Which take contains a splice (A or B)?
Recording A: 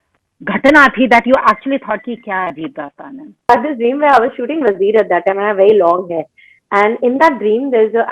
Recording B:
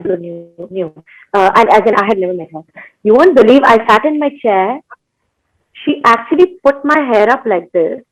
A